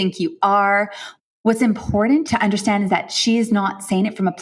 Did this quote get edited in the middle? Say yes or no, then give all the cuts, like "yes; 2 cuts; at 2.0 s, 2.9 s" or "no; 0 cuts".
yes; 2 cuts; at 1.0 s, 2.3 s